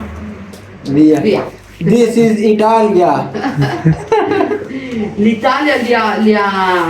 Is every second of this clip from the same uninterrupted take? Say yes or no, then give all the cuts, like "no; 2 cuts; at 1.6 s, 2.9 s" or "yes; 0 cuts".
no; 1 cut; at 3.7 s